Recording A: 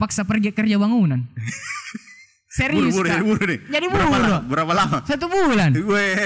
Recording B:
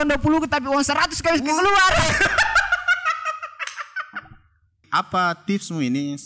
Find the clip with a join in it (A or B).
B